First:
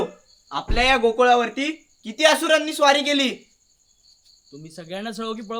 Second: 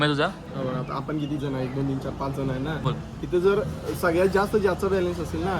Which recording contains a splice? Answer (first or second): second